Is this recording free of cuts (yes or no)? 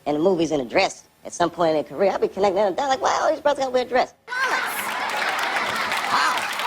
no